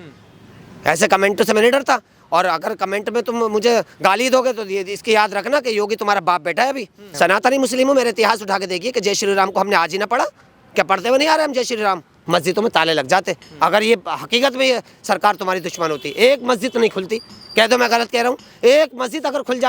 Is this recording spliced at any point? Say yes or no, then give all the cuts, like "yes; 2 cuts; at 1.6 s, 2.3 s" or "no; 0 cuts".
yes; 2 cuts; at 7.1 s, 12.1 s